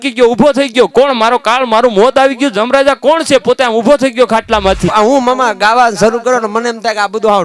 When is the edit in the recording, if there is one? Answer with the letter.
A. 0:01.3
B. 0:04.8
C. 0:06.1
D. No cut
B